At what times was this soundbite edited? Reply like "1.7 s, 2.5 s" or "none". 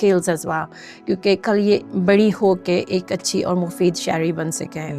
1.9 s